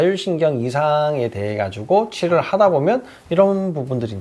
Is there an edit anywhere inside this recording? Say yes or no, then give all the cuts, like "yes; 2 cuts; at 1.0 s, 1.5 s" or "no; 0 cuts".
no; 0 cuts